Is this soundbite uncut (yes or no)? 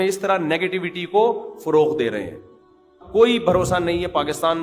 no